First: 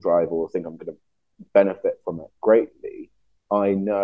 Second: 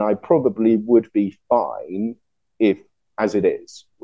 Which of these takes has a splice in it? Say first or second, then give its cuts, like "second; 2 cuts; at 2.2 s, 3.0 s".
second; 1 cut; at 3.0 s